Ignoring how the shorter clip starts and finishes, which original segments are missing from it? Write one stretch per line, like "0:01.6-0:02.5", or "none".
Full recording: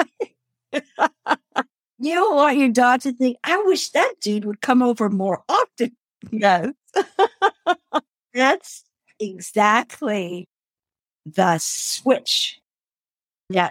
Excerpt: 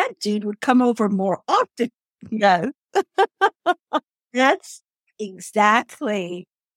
none